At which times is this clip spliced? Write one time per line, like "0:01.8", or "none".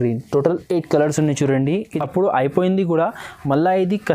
0:02.0